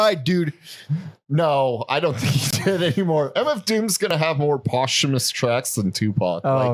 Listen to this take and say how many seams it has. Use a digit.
0